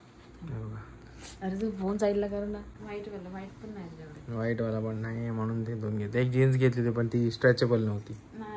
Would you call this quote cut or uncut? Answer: cut